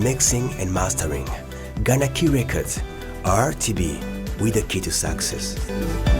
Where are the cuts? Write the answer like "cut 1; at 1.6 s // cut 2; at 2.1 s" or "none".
none